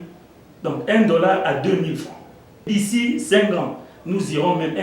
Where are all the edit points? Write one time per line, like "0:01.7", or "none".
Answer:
0:02.6